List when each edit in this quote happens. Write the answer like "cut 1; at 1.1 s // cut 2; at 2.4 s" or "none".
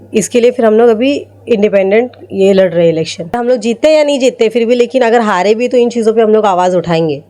cut 1; at 3.4 s